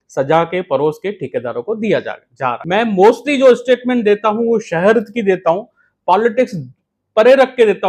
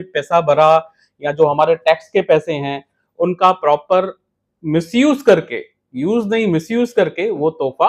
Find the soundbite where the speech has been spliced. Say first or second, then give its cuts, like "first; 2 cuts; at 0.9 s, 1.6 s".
first; 1 cut; at 2.6 s